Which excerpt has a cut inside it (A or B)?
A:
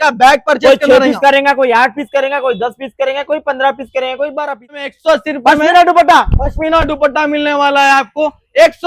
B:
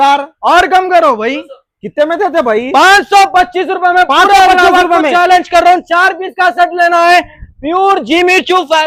A